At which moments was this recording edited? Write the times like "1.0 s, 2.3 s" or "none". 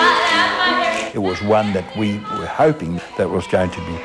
1.1 s, 3.0 s

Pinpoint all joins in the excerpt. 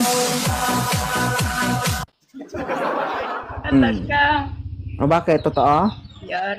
none

